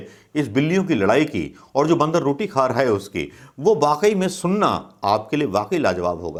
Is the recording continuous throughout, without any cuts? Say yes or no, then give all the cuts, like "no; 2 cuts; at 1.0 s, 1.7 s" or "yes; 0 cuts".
yes; 0 cuts